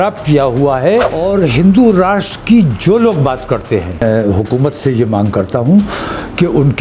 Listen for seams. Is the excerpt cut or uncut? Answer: cut